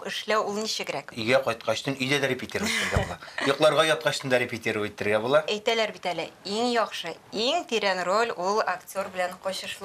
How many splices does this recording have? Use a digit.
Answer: 2